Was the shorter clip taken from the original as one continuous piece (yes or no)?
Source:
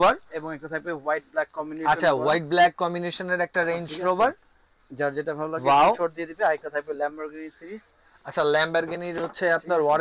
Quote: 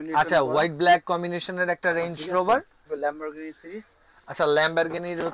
no